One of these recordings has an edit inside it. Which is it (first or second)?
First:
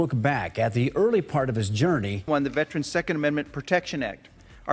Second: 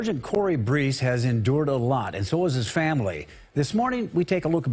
first